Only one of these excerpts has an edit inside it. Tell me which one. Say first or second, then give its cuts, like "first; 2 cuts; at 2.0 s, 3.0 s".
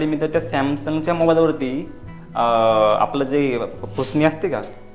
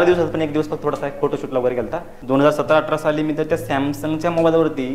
second; 1 cut; at 2.1 s